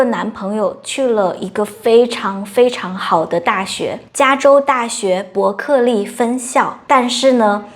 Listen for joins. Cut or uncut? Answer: cut